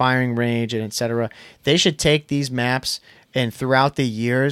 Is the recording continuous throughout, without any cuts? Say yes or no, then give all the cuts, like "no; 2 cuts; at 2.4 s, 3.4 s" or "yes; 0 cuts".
yes; 0 cuts